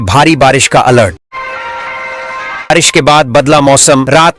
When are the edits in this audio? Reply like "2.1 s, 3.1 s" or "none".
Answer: none